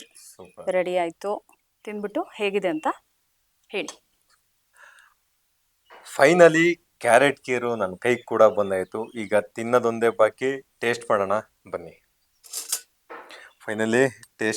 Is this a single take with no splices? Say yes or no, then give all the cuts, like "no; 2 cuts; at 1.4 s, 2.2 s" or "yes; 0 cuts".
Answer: no; 1 cut; at 4.1 s